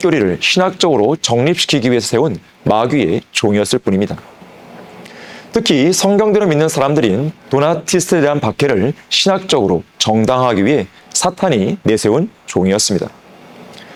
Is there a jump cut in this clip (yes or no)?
no